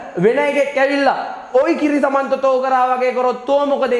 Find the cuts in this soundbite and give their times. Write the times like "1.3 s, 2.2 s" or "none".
none

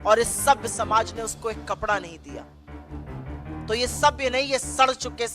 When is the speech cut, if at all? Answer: 2.0 s, 3.7 s

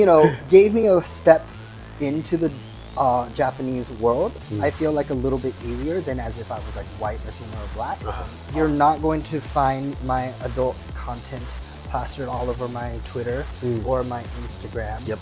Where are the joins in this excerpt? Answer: 8.4 s

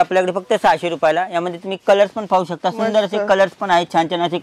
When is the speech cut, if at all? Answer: none

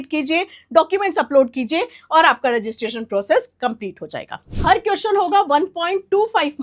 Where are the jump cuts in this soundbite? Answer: 4.4 s

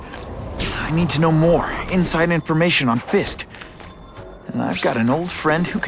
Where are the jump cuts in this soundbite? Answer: 2.1 s

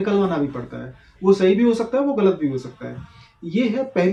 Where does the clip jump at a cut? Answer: none

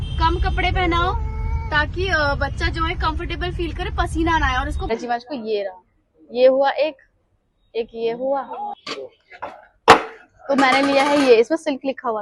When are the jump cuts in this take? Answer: 4.9 s, 8.8 s

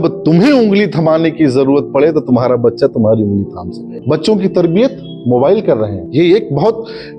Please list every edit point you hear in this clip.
4.0 s

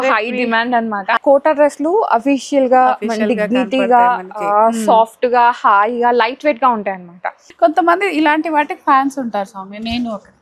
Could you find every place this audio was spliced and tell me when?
1.2 s, 7.4 s

